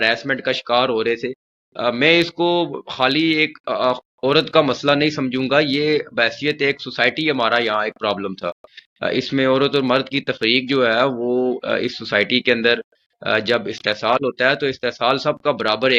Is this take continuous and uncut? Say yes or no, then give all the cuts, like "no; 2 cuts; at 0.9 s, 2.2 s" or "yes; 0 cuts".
yes; 0 cuts